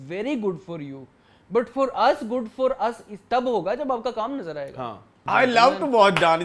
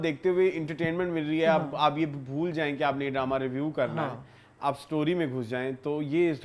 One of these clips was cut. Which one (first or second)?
first